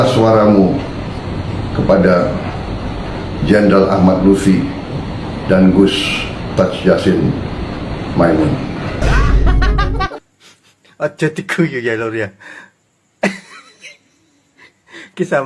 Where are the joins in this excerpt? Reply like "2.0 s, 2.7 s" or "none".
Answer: none